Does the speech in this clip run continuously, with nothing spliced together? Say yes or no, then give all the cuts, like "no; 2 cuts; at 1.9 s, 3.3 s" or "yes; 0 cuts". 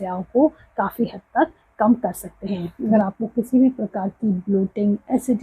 no; 1 cut; at 2.7 s